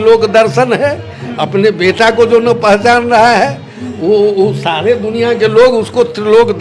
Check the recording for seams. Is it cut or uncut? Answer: uncut